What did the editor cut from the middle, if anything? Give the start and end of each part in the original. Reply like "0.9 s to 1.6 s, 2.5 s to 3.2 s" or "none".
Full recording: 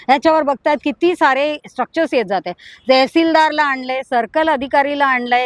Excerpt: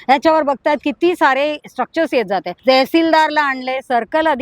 2.5 s to 2.7 s